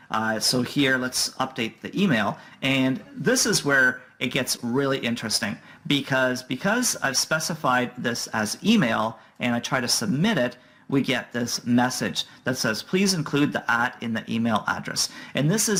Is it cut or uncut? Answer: uncut